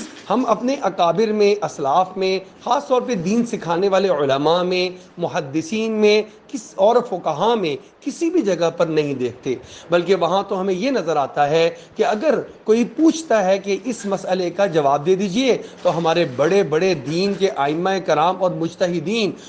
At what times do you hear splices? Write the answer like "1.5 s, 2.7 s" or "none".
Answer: none